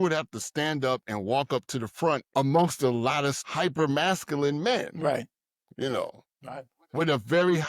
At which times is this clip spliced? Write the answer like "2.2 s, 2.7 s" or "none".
2.3 s, 3.4 s